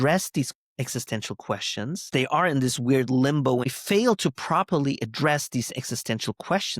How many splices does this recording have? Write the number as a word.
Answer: two